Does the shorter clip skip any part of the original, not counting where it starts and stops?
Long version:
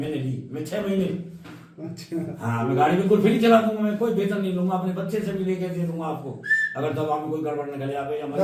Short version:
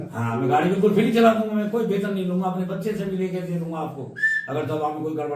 no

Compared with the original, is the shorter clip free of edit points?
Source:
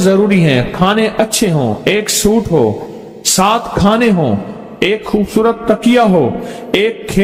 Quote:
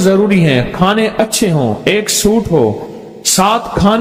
yes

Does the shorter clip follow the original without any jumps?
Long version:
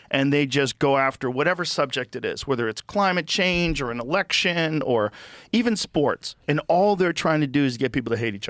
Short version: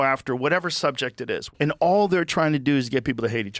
no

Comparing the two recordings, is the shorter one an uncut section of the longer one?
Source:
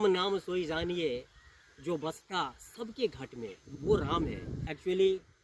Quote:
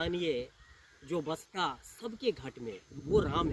yes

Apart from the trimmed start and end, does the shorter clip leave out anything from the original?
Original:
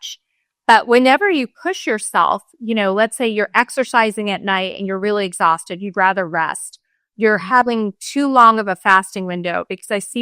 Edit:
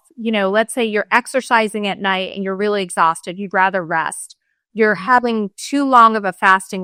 no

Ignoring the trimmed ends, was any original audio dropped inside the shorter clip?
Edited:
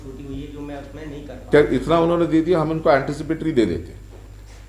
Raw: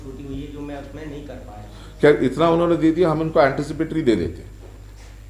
yes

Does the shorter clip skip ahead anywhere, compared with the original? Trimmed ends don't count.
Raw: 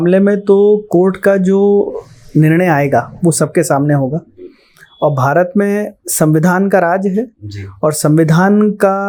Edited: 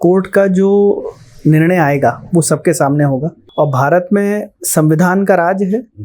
yes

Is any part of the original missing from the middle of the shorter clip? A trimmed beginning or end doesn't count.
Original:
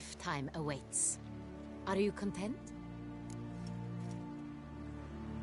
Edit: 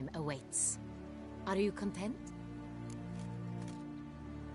yes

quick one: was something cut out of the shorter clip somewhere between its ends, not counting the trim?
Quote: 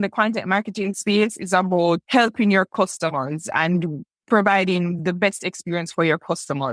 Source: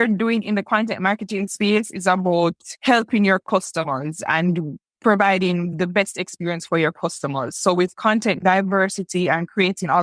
yes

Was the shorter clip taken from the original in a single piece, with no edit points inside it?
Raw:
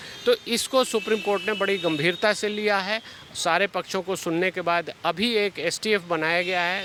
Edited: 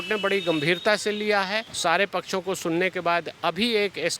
no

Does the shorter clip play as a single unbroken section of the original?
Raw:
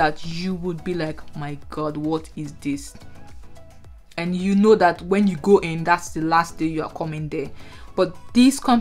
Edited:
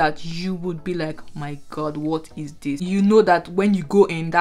no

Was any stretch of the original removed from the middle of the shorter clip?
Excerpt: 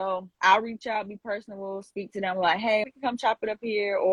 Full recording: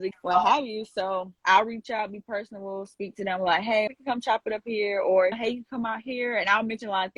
no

